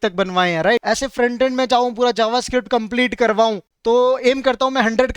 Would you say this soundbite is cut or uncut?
cut